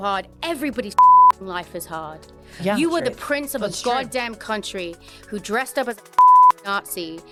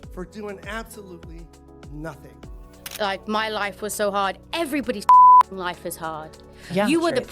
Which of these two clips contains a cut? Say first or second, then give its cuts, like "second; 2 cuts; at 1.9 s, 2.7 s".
second; 1 cut; at 2.8 s